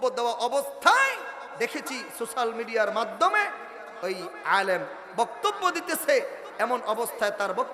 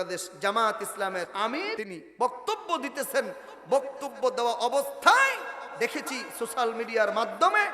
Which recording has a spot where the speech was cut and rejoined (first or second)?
second